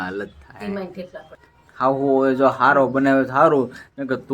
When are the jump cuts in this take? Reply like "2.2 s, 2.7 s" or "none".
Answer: 1.3 s